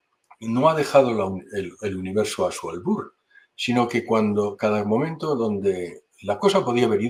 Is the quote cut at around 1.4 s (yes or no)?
no